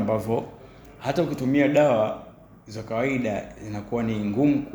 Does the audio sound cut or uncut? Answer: uncut